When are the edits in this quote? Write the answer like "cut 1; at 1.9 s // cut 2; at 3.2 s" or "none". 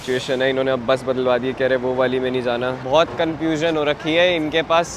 cut 1; at 2.8 s